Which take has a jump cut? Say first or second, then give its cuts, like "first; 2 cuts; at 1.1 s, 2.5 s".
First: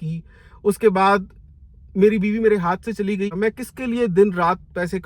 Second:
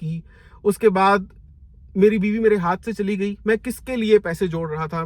first; 1 cut; at 3.3 s